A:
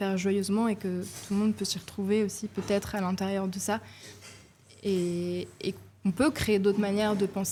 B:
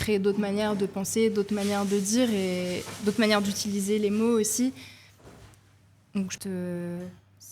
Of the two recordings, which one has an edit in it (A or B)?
B